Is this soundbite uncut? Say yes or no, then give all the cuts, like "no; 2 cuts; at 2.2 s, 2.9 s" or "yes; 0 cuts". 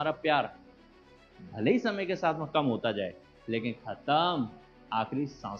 yes; 0 cuts